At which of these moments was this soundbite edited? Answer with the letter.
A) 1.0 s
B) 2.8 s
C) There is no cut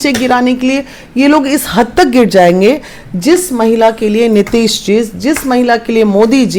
C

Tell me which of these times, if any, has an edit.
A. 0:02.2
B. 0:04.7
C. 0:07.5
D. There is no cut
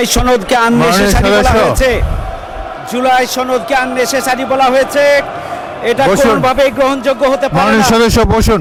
D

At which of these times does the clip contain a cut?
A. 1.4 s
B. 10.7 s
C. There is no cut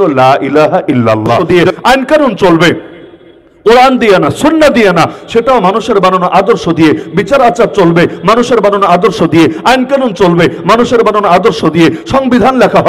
A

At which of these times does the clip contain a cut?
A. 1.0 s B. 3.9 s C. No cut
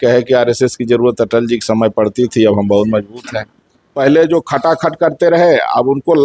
B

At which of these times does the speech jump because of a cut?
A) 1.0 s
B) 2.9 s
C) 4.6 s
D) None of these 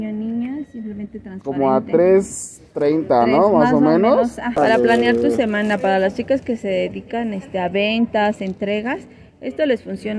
C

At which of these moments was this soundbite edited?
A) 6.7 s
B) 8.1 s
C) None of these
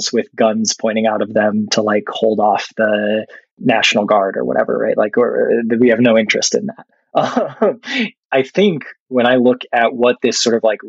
B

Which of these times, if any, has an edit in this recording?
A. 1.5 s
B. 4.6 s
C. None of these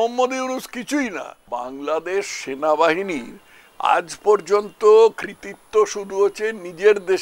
A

